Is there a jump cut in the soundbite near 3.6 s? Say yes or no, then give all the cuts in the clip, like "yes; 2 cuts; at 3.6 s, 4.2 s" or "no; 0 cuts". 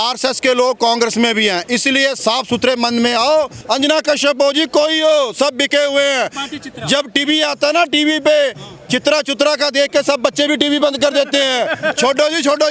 yes; 1 cut; at 3.6 s